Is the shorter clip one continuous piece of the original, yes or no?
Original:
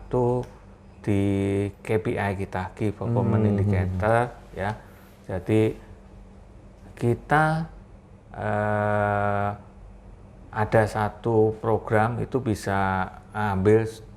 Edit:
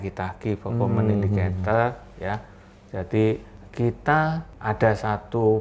no